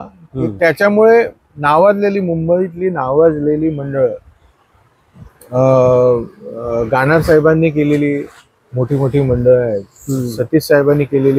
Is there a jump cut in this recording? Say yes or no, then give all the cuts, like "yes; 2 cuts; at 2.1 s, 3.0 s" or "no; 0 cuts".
no; 0 cuts